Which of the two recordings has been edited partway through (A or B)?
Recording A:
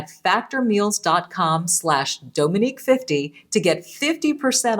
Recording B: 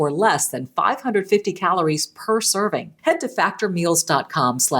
B